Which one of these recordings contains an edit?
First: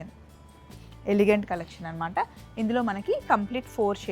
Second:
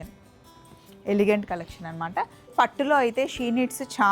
second; 1 cut; at 2.5 s

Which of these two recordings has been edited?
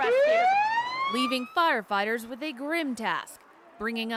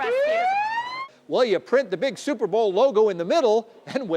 second; 1 cut; at 1.1 s

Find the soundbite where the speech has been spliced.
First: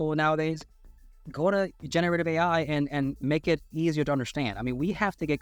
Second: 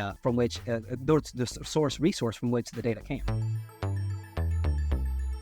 second; 1 cut; at 3.3 s

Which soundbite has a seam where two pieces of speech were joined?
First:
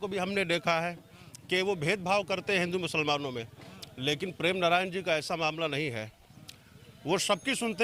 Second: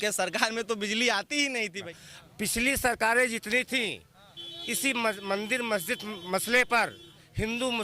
second; 1 cut; at 1.8 s

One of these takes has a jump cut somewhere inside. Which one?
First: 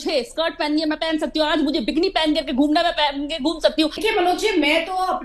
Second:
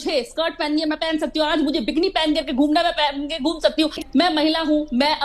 second; 1 cut; at 4.0 s

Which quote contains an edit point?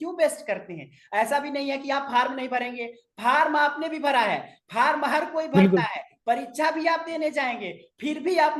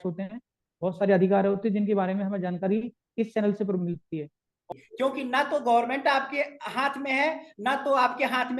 second; 1 cut; at 4.6 s

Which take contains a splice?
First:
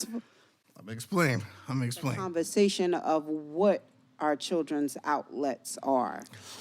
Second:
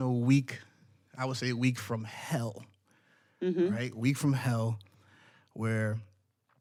first; 1 cut; at 2.2 s

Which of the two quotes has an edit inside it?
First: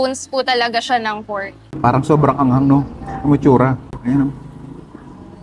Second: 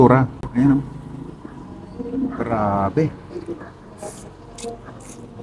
first; 1 cut; at 1.7 s

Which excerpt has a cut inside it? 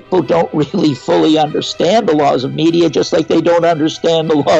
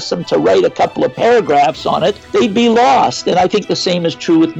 second; 1 cut; at 2.2 s

